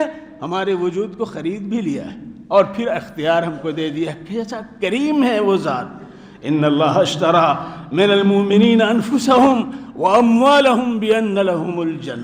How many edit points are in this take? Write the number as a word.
zero